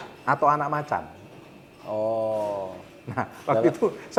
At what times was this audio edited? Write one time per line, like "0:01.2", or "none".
none